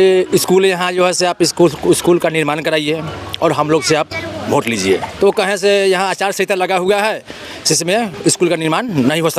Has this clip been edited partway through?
yes; 1 cut; at 5.1 s

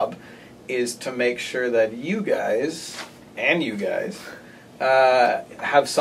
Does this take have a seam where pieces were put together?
no; 0 cuts

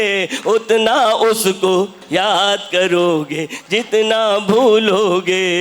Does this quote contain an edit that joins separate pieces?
yes; 1 cut; at 2.0 s

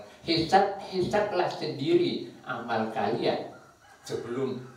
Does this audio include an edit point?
no; 0 cuts

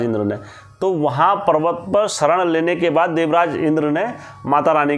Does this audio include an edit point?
no; 0 cuts

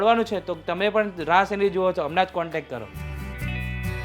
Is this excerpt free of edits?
no; 1 cut; at 2.9 s

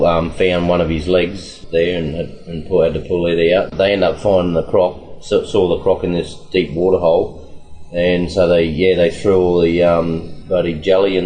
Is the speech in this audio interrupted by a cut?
yes; 3 cuts; at 1.5 s, 3.7 s, 10.3 s

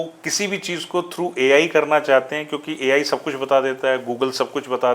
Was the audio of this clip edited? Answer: no; 0 cuts

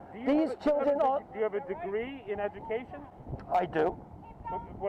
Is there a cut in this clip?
no; 0 cuts

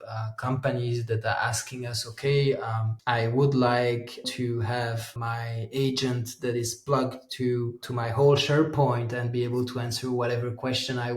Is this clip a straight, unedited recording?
no; 4 cuts; at 2.9 s, 4.3 s, 5.1 s, 7.8 s

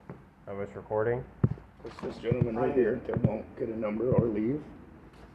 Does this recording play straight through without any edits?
yes; 0 cuts

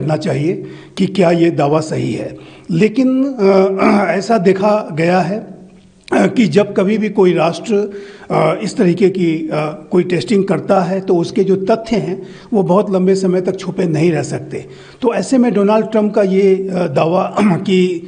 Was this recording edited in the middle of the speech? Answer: no; 0 cuts

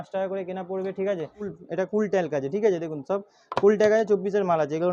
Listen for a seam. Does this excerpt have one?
yes; 1 cut; at 1.5 s

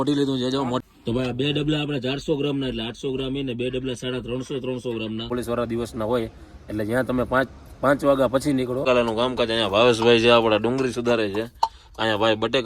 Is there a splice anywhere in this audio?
yes; 3 cuts; at 0.8 s, 5.3 s, 8.8 s

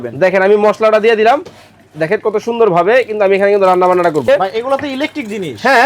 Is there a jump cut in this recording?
yes; 1 cut; at 4.2 s

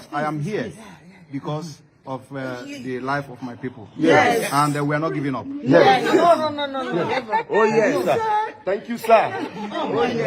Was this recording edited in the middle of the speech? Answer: no; 0 cuts

